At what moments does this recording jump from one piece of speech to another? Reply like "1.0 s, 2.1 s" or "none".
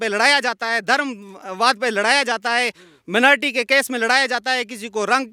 none